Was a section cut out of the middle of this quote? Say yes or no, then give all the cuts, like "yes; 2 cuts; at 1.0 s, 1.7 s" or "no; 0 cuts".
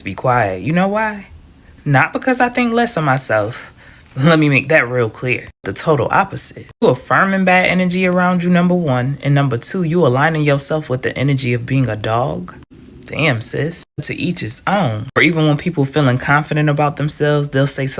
no; 0 cuts